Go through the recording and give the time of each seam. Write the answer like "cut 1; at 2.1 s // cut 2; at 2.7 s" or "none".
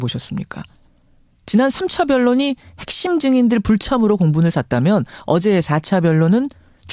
cut 1; at 3.2 s